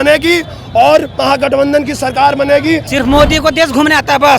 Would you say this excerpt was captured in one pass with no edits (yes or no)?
no